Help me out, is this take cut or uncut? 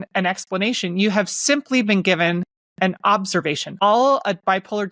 cut